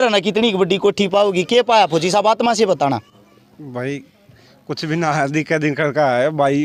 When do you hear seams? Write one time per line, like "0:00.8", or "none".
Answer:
none

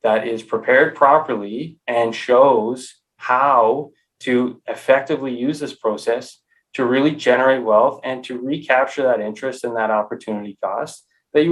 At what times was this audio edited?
none

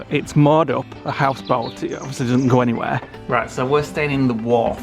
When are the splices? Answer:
0:03.1

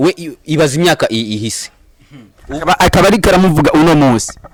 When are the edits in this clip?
none

